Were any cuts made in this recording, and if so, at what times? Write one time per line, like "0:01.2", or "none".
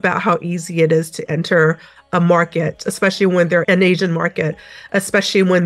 0:03.6